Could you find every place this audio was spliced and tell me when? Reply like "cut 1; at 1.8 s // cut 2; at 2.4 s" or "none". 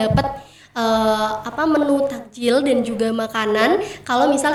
none